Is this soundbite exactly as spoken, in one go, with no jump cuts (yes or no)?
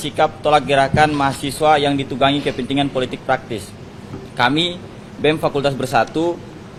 yes